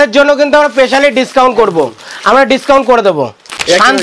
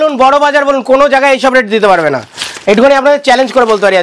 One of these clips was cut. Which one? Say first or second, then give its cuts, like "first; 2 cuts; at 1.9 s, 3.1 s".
first; 1 cut; at 3.1 s